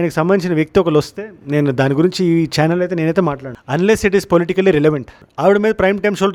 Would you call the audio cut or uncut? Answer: uncut